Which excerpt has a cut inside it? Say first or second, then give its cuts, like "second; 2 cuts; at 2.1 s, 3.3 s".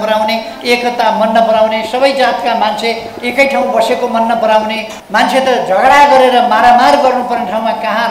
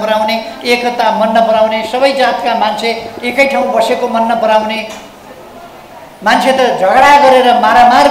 first; 1 cut; at 4.9 s